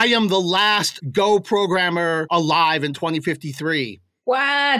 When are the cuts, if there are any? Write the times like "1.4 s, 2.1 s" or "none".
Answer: 0.9 s, 2.2 s